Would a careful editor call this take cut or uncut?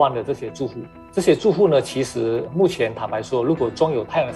uncut